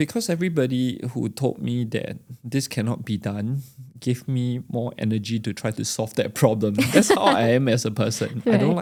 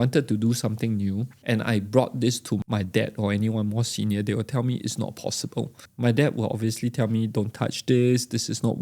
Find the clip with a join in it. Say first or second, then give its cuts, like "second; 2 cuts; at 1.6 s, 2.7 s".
second; 3 cuts; at 1.3 s, 2.6 s, 5.8 s